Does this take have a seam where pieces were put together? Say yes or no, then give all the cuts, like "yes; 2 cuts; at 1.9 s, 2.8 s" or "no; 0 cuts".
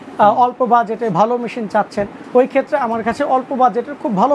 no; 0 cuts